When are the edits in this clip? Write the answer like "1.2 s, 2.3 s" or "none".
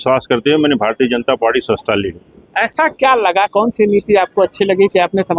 none